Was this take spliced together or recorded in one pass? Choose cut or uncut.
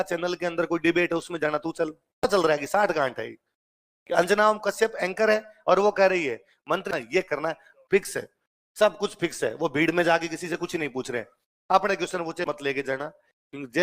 cut